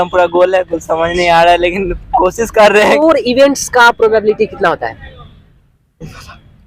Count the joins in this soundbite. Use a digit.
1